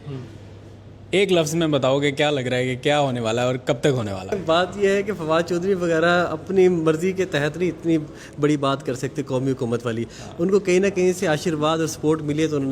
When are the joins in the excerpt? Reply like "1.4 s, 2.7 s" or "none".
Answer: 4.3 s